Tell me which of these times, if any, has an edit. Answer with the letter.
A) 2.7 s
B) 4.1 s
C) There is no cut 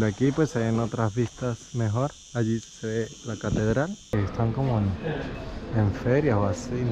B